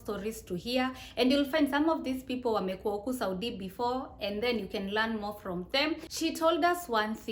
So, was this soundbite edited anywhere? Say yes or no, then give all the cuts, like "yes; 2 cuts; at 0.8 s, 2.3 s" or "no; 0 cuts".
yes; 1 cut; at 6.1 s